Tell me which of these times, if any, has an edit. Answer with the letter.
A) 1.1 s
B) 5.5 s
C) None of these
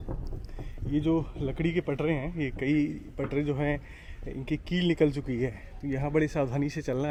C